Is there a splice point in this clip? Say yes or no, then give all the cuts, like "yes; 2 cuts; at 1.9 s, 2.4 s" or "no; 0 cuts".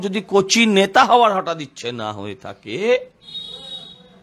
no; 0 cuts